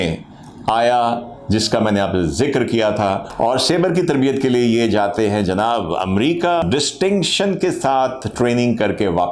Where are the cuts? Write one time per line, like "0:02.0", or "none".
0:03.3
0:06.6